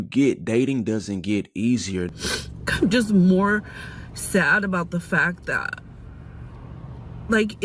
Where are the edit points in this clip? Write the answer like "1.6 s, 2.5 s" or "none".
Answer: 2.1 s